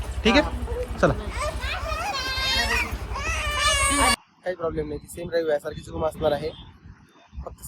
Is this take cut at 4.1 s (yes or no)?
yes